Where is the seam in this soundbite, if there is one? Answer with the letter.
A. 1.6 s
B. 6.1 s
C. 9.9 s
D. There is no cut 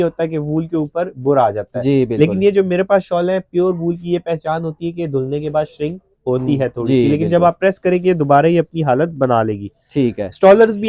D